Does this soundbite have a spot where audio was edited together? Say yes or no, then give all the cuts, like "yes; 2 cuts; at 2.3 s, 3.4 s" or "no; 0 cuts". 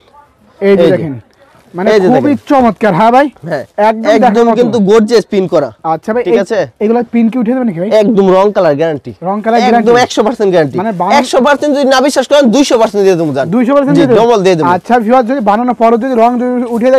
no; 0 cuts